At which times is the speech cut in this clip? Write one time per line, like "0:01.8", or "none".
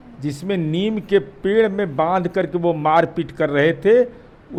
none